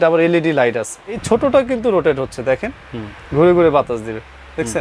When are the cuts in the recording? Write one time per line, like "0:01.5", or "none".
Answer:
0:01.2